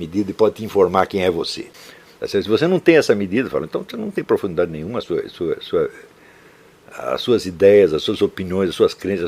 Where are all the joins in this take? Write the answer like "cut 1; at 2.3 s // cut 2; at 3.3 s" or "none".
cut 1; at 1.6 s